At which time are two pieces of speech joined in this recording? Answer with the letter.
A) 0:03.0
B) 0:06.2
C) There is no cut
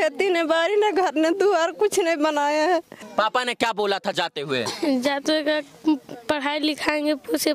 A